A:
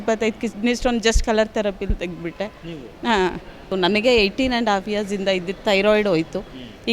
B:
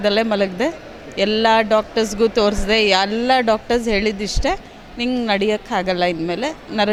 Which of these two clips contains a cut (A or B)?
A